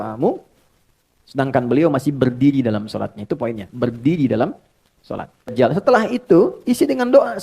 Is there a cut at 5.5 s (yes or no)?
yes